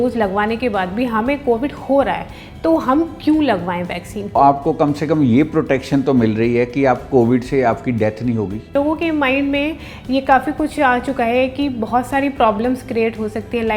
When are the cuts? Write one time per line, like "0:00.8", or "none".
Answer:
0:04.3
0:08.7